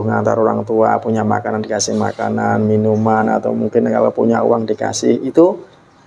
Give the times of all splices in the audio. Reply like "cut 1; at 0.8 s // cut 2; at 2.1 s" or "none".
none